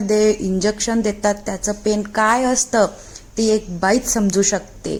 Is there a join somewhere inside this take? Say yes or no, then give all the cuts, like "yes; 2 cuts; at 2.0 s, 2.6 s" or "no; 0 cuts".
no; 0 cuts